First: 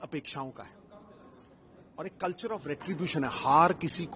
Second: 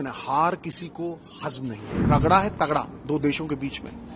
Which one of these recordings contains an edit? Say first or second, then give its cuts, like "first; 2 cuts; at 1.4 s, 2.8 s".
second; 1 cut; at 2.0 s